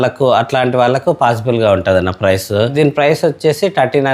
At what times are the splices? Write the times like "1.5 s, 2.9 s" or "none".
2.7 s